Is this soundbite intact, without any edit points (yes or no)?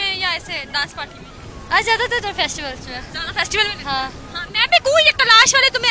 yes